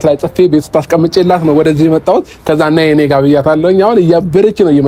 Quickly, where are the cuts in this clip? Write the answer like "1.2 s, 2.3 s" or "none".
none